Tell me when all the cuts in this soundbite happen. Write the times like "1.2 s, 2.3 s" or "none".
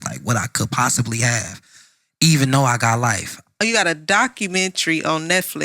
3.5 s